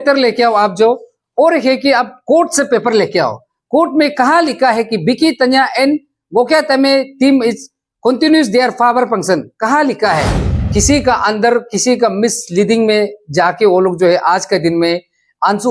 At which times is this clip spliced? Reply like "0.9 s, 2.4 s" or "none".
10.4 s